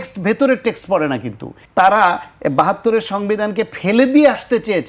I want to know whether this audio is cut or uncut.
cut